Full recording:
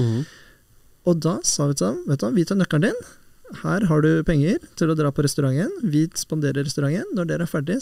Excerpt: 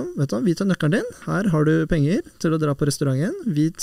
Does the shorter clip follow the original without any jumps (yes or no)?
no